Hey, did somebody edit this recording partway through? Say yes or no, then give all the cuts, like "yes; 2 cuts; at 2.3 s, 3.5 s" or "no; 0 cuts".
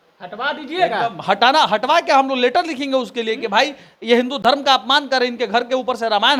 no; 0 cuts